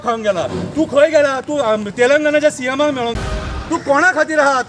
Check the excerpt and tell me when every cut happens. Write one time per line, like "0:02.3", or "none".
0:03.5